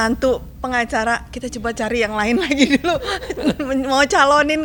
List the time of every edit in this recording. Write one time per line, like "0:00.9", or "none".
none